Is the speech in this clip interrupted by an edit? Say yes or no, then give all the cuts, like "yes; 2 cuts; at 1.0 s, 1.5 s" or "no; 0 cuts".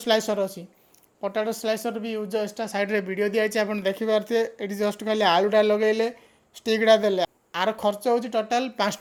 no; 0 cuts